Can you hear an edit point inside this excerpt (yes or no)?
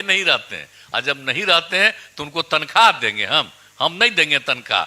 no